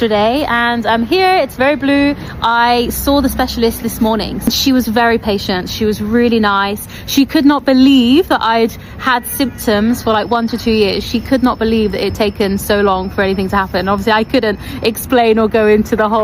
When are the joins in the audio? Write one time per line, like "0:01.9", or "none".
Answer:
none

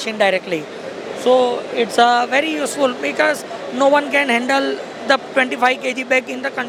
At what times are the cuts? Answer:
none

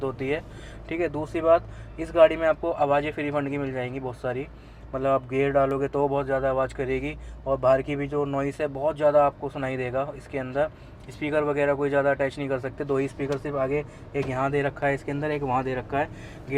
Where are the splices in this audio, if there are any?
none

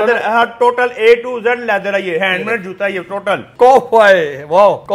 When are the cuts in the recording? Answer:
0:03.5

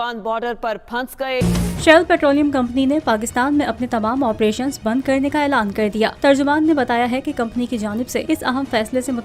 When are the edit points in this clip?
0:01.4

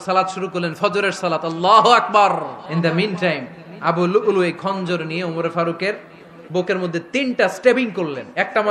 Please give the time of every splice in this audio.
0:02.6

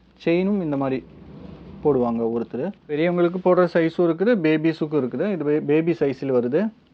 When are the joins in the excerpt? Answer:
0:03.0

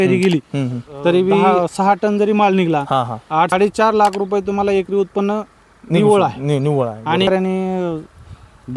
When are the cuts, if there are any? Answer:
0:01.4
0:03.5
0:07.3

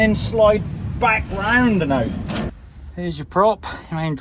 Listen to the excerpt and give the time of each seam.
0:02.6

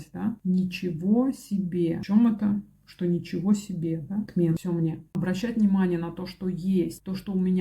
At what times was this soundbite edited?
0:05.1

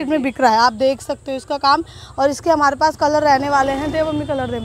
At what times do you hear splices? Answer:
none

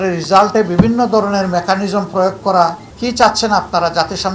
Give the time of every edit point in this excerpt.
0:02.9

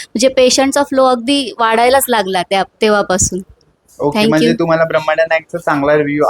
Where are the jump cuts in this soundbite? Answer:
none

